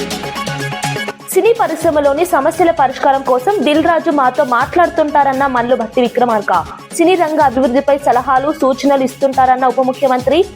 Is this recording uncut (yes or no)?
no